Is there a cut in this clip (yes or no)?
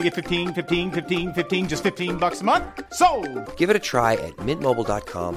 no